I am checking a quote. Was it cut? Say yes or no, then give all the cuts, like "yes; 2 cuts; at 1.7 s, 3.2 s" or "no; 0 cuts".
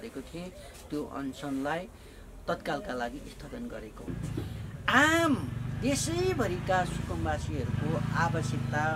yes; 1 cut; at 4.1 s